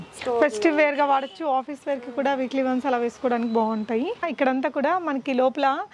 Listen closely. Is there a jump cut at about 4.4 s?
yes; 1 cut; at 4.4 s

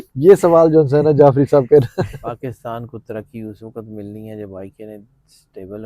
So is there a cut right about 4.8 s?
no; 1 cut; at 2.2 s

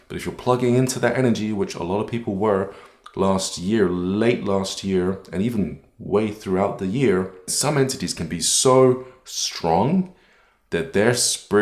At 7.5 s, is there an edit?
yes; 1 cut; at 7.5 s

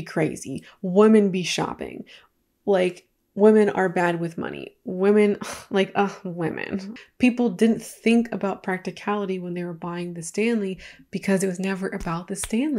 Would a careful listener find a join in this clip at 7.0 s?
yes; 1 cut; at 7.0 s

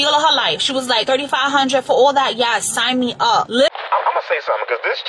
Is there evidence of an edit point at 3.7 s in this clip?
yes; 1 cut; at 3.7 s

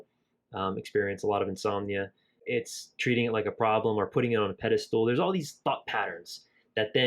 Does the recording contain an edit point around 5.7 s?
no; 1 cut; at 2.4 s

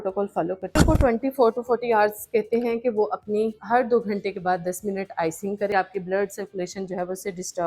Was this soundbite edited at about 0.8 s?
yes; 2 cuts; at 0.8 s, 5.7 s

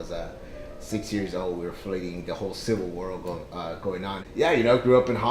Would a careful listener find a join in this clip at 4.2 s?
yes; 1 cut; at 4.2 s

